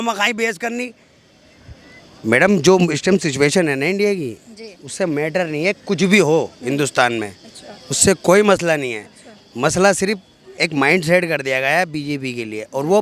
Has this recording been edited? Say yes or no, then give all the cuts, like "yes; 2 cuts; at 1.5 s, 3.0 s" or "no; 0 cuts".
no; 0 cuts